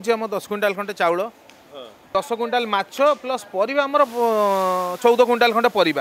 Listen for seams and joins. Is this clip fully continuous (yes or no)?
no